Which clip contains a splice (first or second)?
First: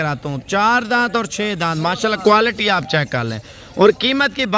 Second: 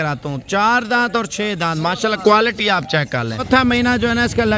second